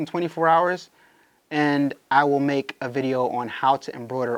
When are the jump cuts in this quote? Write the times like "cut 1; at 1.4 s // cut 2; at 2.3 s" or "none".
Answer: none